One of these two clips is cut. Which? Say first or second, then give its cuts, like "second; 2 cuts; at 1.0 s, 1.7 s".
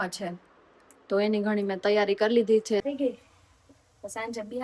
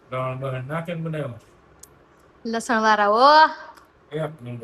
first; 1 cut; at 2.8 s